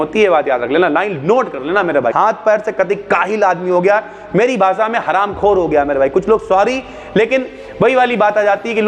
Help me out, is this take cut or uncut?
cut